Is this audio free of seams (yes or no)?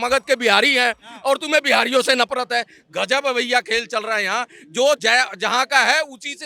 yes